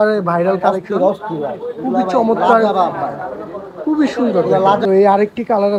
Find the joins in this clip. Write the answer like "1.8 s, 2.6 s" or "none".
4.8 s

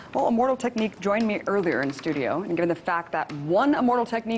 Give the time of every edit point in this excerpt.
2.1 s

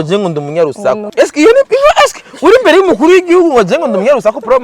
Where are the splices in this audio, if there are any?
1.0 s

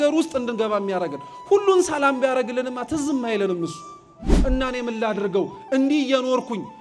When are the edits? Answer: 4.4 s

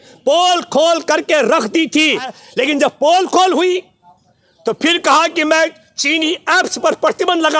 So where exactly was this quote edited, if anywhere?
2.4 s

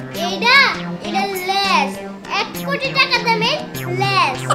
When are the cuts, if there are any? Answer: none

